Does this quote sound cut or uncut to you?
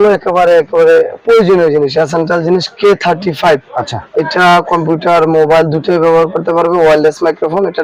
uncut